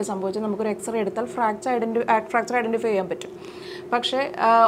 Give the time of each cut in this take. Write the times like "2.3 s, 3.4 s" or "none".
none